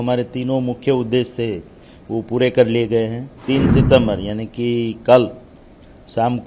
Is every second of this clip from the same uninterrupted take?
no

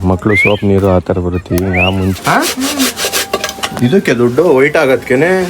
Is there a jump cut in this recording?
yes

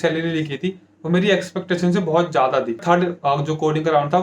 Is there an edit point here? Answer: yes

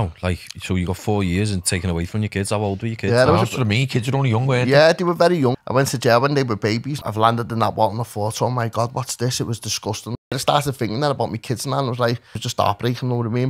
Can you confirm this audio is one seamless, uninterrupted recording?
no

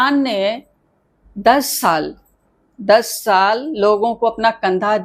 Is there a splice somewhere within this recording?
no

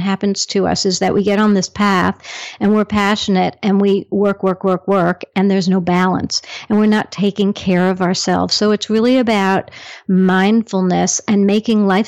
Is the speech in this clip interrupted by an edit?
no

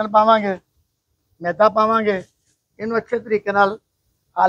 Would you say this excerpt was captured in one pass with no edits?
yes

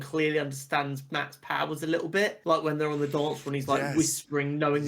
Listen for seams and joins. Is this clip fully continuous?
no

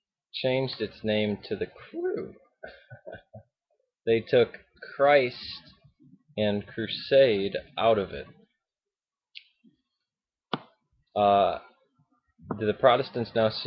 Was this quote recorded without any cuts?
yes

